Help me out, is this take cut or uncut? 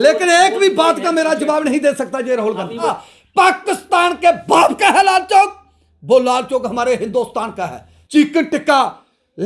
cut